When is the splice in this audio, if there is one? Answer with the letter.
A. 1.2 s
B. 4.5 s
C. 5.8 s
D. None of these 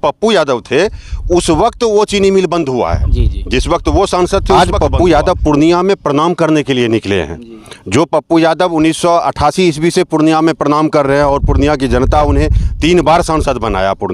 B